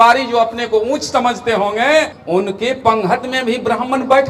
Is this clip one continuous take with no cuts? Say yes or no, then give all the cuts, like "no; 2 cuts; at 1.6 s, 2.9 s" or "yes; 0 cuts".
no; 1 cut; at 2.2 s